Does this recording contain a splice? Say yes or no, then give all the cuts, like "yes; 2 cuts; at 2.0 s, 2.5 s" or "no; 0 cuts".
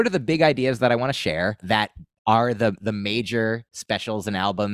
yes; 1 cut; at 1.6 s